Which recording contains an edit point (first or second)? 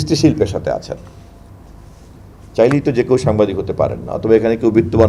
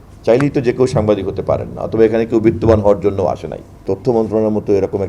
second